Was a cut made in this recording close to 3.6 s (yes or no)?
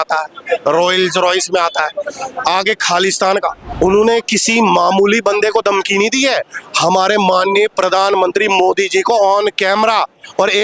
yes